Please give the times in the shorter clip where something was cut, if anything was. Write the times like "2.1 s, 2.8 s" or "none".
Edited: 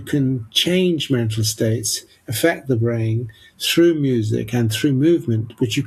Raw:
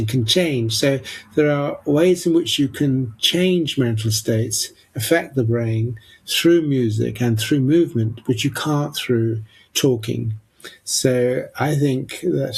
none